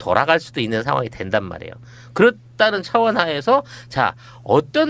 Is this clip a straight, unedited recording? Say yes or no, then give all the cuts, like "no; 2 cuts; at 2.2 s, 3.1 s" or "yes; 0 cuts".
yes; 0 cuts